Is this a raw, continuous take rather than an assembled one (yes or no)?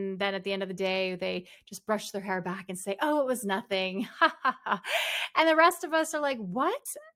yes